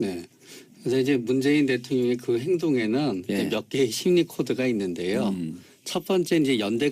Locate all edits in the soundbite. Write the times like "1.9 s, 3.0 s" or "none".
5.5 s